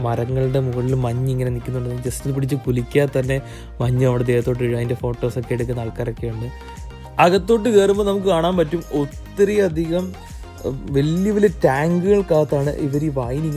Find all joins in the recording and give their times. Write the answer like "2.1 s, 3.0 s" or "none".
6.7 s